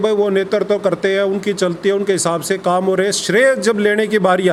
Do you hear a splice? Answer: no; 0 cuts

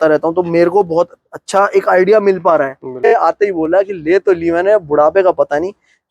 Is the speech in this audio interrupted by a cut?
yes; 1 cut; at 3.0 s

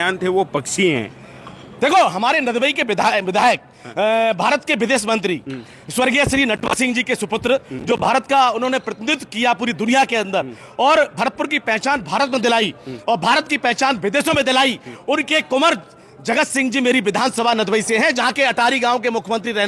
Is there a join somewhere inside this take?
no; 0 cuts

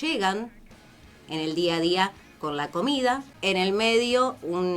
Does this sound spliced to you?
yes; 1 cut; at 3.3 s

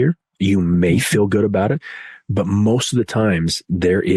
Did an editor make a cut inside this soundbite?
no; 0 cuts

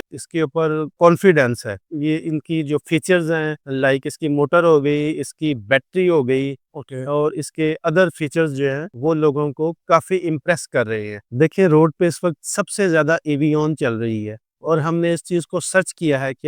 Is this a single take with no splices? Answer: no; 1 cut; at 11.2 s

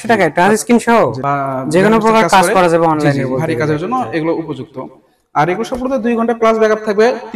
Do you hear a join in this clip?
yes; 1 cut; at 1.2 s

